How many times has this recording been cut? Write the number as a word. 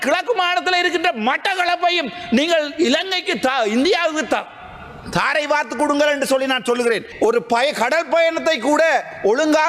one